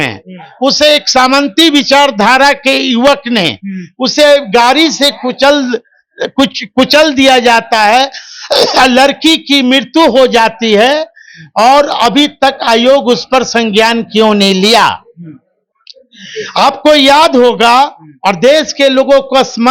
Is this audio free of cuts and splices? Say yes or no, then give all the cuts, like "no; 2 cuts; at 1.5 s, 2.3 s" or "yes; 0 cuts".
yes; 0 cuts